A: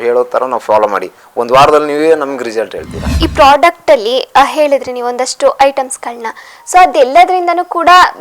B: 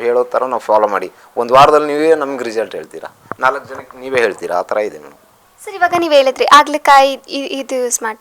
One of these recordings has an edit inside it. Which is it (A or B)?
A